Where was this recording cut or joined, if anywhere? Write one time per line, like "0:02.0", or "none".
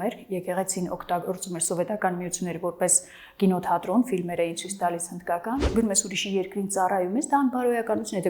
0:05.7

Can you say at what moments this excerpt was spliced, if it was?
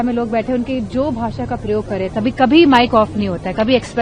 none

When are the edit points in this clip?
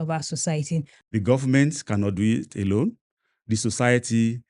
0:00.9

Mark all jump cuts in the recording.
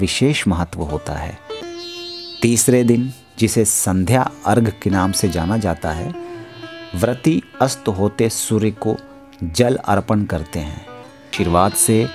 0:01.6
0:11.3

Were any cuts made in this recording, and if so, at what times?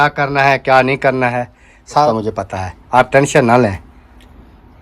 0:02.1

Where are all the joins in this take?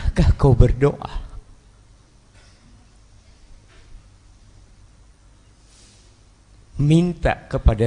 none

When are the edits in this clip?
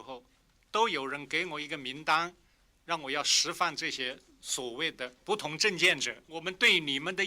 0:05.2
0:06.2

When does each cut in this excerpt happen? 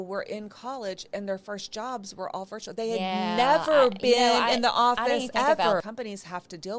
0:05.8

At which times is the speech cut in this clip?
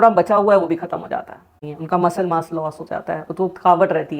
0:01.5

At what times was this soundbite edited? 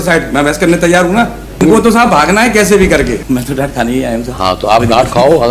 0:01.6
0:03.2

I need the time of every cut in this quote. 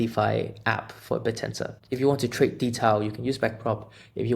0:01.8

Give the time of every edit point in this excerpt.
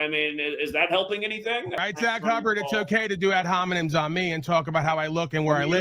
0:01.7

